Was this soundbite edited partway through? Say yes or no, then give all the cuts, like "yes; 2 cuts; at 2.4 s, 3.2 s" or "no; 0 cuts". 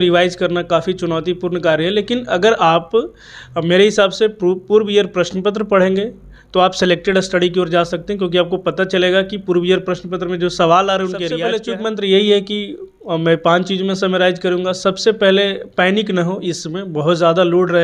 yes; 1 cut; at 11.4 s